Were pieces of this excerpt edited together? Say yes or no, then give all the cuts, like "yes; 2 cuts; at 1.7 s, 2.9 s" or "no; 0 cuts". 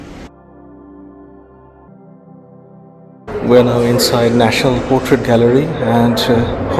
yes; 1 cut; at 1.9 s